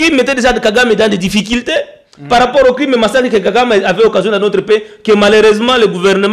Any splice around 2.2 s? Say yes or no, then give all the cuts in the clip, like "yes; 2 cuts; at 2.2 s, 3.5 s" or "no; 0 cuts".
no; 0 cuts